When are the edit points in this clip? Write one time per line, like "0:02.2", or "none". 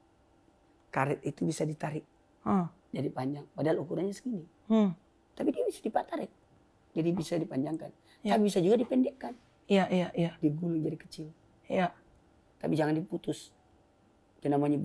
none